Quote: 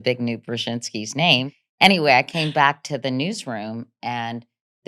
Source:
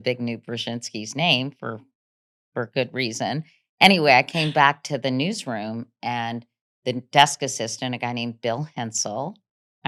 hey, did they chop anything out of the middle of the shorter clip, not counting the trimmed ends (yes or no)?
yes